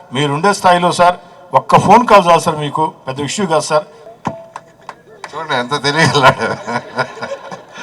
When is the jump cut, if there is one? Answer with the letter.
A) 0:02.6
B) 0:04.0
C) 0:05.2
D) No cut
B